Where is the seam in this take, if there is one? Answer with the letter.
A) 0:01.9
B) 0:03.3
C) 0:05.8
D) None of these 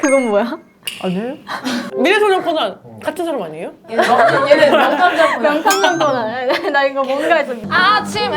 A